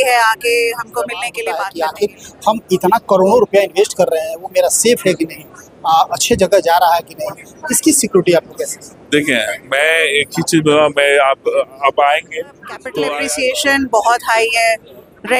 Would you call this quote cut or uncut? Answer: cut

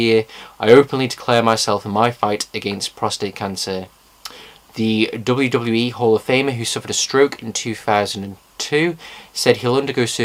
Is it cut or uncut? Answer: uncut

